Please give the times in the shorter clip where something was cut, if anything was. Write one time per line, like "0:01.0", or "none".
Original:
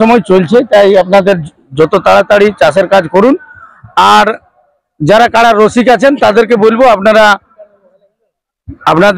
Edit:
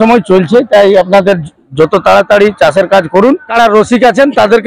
0:03.5